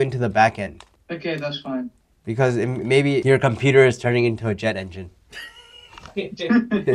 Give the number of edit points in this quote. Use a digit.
2